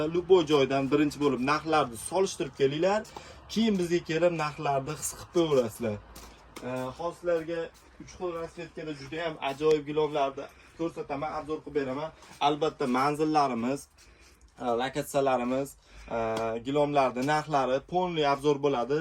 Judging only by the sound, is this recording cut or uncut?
uncut